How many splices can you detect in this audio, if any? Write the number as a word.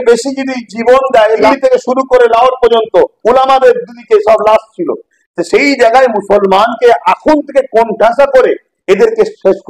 one